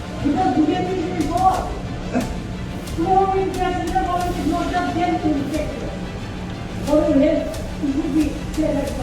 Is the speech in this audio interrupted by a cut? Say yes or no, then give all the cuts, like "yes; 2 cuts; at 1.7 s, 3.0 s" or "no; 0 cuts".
no; 0 cuts